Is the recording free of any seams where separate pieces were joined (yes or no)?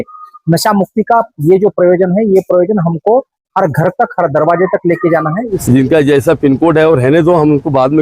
no